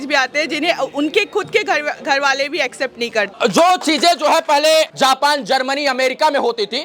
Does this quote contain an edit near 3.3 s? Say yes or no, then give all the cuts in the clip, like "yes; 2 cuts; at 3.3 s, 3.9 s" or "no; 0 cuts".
yes; 2 cuts; at 3.3 s, 4.9 s